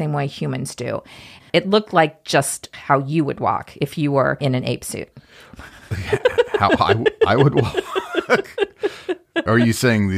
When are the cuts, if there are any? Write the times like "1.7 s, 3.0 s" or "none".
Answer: 1.5 s, 2.7 s, 4.4 s

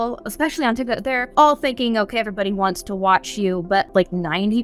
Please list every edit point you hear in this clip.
1.2 s, 3.9 s

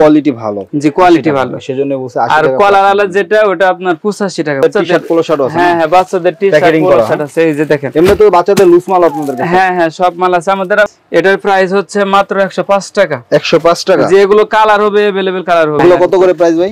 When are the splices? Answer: 4.6 s, 10.9 s, 15.8 s

